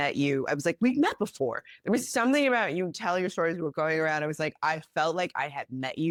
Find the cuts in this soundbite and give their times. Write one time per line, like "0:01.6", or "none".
none